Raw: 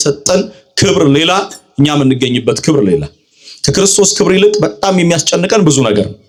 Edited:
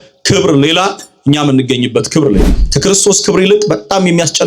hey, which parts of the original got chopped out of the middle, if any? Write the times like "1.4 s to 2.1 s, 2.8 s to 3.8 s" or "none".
3.1 s to 3.5 s